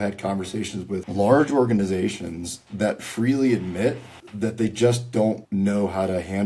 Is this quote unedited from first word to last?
no; 1 cut; at 1.0 s

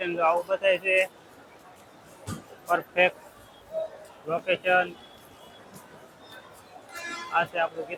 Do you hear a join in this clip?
no; 0 cuts

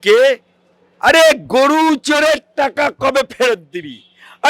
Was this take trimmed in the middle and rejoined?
no; 0 cuts

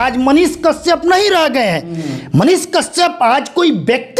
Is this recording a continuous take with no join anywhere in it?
yes; 0 cuts

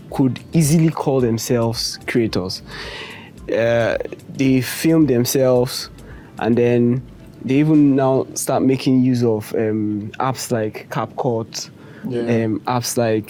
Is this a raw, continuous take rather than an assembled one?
yes; 0 cuts

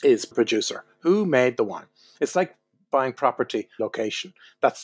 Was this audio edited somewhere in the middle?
no; 0 cuts

